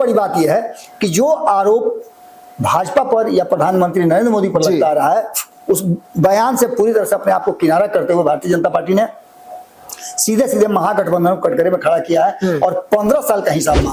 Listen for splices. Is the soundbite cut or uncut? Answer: uncut